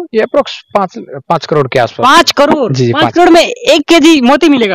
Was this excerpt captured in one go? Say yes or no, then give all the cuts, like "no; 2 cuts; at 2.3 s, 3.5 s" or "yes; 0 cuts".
yes; 0 cuts